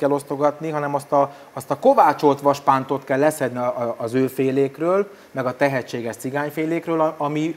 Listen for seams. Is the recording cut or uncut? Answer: uncut